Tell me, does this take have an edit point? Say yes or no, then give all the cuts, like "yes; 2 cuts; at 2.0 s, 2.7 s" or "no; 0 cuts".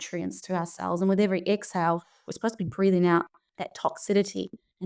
no; 0 cuts